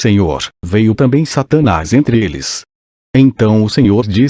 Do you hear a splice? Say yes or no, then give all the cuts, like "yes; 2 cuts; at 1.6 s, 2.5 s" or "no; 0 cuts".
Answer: yes; 1 cut; at 2.6 s